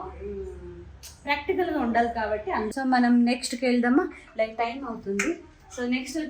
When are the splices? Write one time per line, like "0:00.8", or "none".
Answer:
0:02.7